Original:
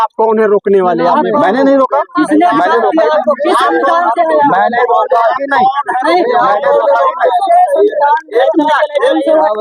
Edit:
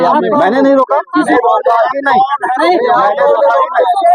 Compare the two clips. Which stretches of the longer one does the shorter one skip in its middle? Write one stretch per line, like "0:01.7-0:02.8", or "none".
0:02.3-0:04.7